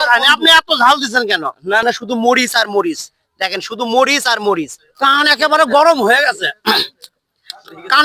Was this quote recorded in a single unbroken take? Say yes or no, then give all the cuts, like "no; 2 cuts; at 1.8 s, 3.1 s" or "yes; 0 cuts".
no; 2 cuts; at 1.8 s, 4.8 s